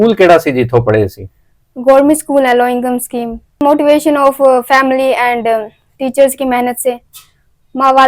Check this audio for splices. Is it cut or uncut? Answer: cut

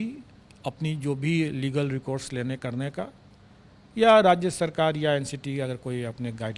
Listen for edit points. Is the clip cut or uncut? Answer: uncut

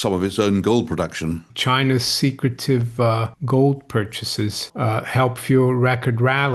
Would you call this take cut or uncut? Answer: cut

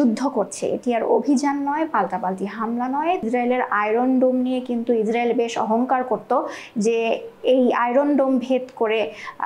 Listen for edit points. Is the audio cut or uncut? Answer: cut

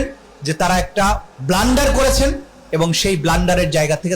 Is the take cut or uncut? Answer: cut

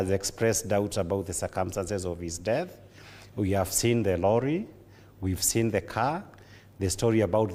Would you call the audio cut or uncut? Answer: uncut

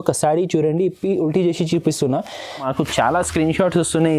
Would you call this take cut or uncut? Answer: cut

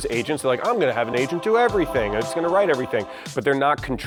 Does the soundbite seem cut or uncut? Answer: uncut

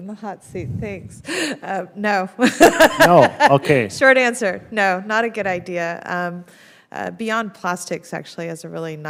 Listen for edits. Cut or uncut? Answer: uncut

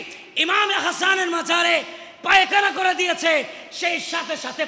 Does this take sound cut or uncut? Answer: uncut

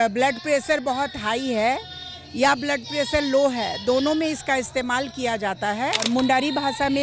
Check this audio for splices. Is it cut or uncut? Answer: cut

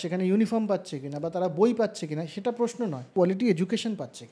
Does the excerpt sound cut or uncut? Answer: cut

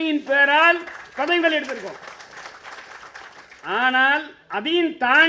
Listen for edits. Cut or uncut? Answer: uncut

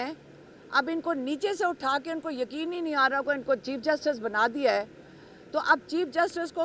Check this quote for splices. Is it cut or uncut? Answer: uncut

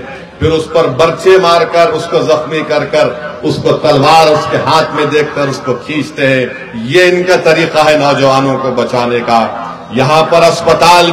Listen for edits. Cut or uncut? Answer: uncut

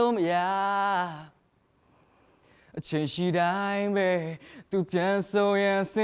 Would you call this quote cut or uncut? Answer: cut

